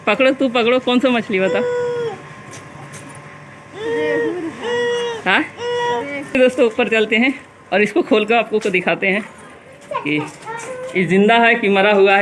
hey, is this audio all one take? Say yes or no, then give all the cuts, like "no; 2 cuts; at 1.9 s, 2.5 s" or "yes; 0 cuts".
no; 1 cut; at 6.3 s